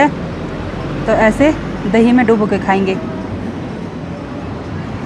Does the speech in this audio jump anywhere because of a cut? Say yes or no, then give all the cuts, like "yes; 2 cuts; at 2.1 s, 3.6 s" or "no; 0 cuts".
no; 0 cuts